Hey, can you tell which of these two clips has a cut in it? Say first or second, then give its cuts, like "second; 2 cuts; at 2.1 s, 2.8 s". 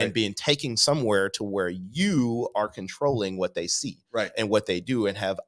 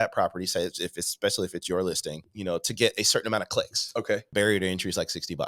second; 2 cuts; at 2.3 s, 4.3 s